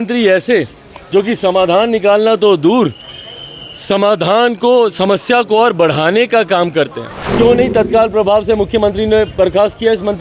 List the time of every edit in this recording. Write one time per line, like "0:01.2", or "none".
0:07.2